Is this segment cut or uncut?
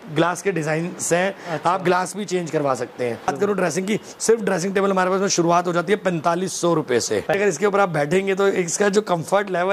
cut